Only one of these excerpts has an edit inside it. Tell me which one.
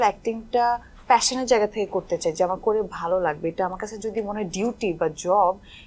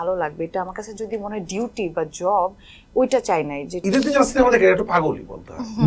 second; 1 cut; at 3.8 s

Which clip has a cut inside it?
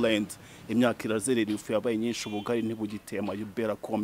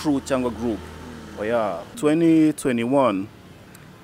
second; 1 cut; at 1.9 s

